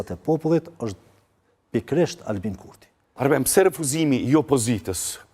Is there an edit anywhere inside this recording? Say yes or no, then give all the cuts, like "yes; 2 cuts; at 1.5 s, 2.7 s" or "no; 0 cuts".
yes; 1 cut; at 3.1 s